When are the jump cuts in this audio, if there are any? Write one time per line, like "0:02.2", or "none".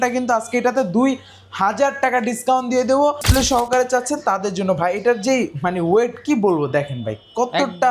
0:03.2